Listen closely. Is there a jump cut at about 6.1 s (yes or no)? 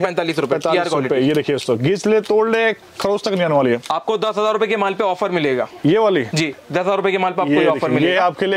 no